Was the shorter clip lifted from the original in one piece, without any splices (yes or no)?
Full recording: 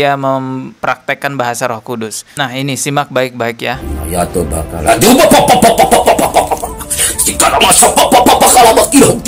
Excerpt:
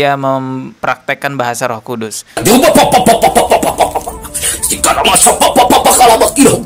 no